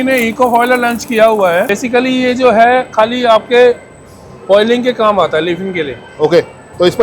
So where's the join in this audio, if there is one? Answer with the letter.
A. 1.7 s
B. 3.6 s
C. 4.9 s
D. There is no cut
A